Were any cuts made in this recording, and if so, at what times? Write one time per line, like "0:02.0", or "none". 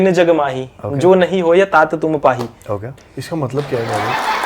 0:03.0